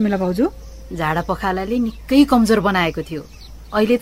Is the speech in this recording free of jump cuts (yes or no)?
yes